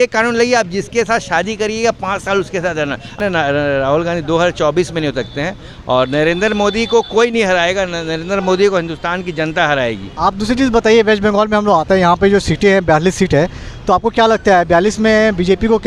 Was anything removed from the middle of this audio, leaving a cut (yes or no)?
yes